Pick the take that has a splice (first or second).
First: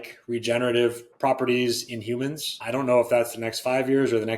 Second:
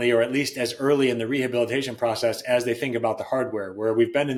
first